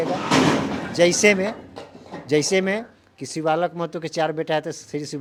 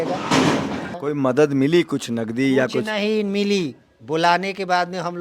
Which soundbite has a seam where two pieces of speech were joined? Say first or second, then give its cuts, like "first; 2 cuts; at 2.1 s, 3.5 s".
second; 1 cut; at 0.9 s